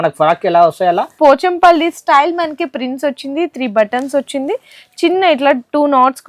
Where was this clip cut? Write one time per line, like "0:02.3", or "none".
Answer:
0:01.1